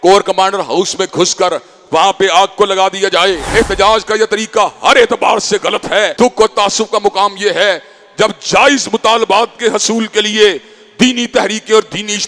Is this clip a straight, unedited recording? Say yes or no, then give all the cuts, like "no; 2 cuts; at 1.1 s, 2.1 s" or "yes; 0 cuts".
no; 2 cuts; at 3.4 s, 6.1 s